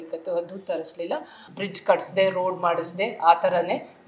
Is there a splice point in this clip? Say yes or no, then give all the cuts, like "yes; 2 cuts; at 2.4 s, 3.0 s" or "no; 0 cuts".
yes; 1 cut; at 1.4 s